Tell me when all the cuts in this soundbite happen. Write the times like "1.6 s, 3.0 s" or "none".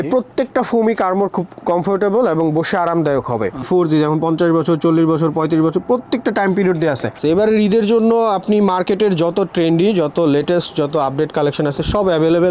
3.7 s, 7.2 s

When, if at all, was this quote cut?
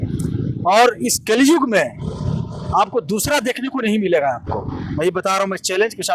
none

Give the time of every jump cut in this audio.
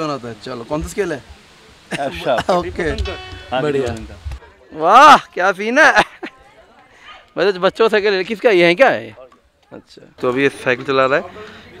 4.6 s

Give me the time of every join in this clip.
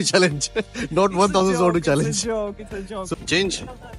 3.1 s

